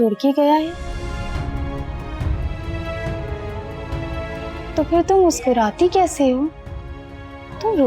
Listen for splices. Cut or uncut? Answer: cut